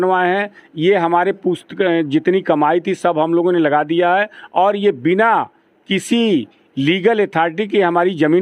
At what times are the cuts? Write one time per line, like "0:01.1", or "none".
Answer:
none